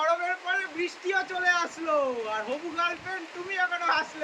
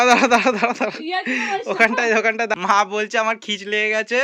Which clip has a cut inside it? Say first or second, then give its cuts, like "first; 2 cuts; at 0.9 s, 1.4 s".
second; 1 cut; at 2.5 s